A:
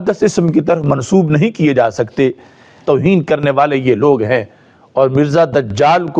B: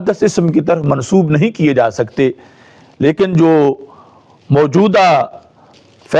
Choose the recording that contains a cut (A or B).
A